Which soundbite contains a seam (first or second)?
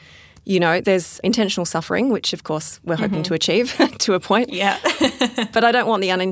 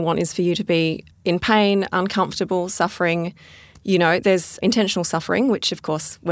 second